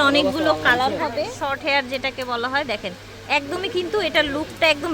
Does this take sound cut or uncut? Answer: cut